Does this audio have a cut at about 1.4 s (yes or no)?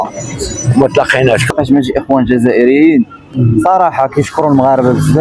yes